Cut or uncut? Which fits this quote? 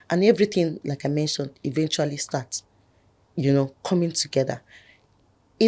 uncut